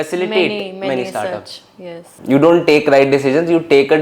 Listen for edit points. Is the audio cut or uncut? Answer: cut